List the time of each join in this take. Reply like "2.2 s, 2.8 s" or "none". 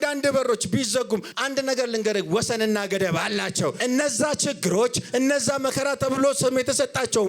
1.3 s, 3.8 s